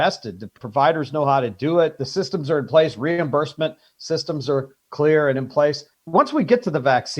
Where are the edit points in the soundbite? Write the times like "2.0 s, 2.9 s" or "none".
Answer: 5.9 s